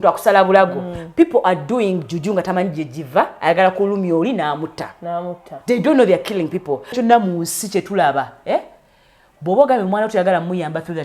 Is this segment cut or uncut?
cut